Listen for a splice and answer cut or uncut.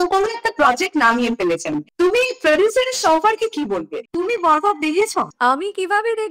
cut